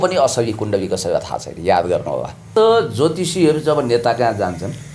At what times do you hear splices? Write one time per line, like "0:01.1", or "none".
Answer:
0:02.4